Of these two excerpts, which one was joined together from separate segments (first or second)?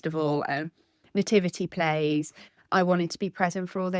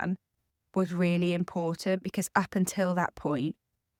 first